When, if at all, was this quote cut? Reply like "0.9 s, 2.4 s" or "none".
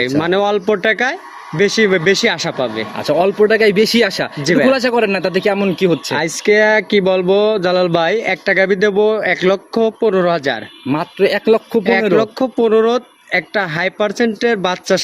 none